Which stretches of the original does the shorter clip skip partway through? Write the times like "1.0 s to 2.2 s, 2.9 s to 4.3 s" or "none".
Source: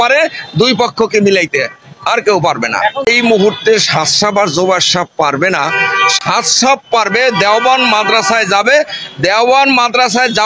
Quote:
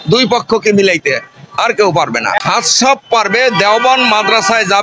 2.9 s to 6.2 s